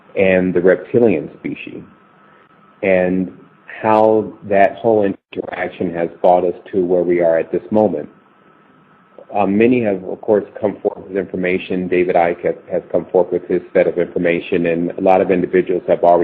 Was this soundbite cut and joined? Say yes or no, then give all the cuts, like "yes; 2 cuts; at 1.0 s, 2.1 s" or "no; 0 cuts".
yes; 1 cut; at 8.2 s